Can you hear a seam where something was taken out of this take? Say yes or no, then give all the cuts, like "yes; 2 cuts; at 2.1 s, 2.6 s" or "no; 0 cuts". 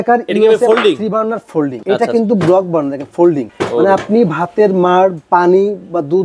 no; 0 cuts